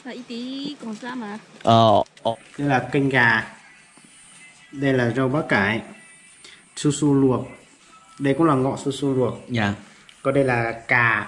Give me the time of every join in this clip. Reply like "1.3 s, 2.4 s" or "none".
2.3 s